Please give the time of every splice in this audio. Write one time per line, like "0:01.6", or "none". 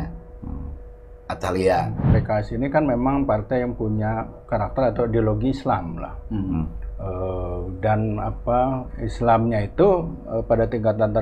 0:02.0